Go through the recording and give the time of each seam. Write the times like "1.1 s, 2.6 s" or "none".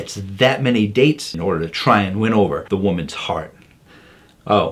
2.6 s, 3.5 s